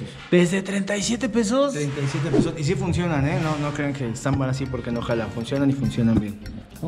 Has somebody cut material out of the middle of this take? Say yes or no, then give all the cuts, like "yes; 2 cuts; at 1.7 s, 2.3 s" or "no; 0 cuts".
no; 0 cuts